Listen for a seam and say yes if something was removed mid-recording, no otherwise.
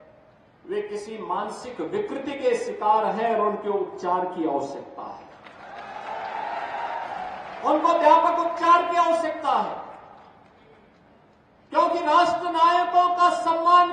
no